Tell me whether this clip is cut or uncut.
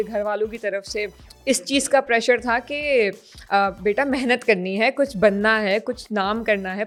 uncut